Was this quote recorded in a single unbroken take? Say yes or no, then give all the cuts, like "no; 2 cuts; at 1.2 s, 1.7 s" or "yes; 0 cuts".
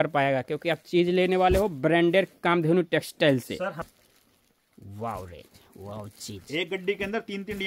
no; 1 cut; at 3.8 s